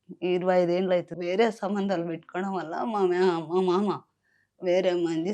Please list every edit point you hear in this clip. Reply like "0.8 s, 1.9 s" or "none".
1.1 s